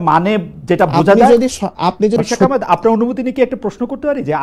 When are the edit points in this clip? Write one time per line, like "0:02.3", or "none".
0:02.2